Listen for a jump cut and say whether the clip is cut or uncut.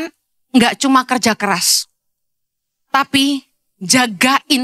uncut